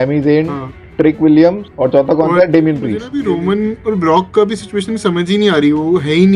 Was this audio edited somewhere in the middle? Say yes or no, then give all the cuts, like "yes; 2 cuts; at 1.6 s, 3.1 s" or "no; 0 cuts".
yes; 1 cut; at 3.1 s